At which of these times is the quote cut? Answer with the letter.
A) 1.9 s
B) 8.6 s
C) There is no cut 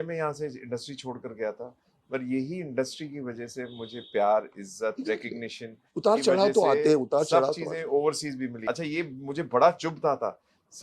B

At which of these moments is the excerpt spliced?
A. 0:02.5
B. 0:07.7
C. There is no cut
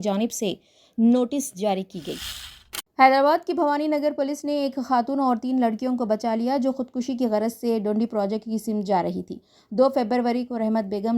A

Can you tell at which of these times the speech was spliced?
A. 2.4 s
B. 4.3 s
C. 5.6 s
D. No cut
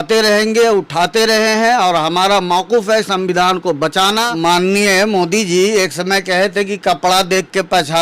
B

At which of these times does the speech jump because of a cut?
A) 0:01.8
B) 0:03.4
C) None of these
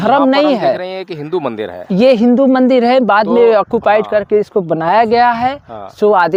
C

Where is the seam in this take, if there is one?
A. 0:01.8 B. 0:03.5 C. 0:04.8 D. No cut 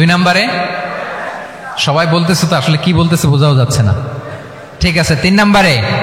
D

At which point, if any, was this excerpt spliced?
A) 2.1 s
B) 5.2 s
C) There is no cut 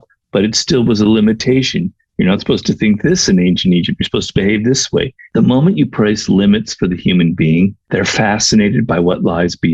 B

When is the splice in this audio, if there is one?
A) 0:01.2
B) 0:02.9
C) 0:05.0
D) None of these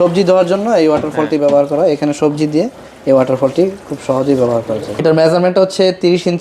C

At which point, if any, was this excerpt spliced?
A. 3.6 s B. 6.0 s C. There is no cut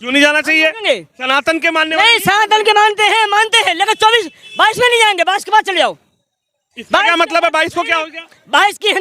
C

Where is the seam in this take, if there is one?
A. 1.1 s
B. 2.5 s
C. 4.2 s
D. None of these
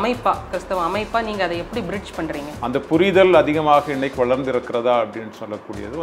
B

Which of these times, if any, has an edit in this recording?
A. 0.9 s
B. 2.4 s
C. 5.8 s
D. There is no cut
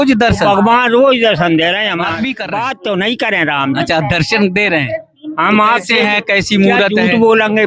B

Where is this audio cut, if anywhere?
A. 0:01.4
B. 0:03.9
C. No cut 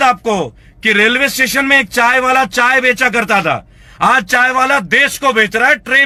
C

